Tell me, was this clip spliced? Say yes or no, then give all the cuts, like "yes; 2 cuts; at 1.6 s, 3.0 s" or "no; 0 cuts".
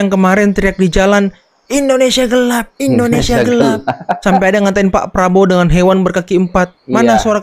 no; 0 cuts